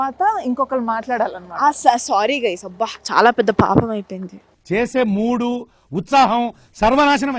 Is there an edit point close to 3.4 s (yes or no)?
no